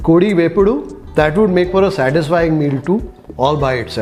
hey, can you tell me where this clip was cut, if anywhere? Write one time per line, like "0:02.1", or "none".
none